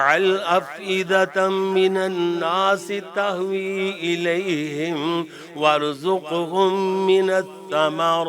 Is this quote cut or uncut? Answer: uncut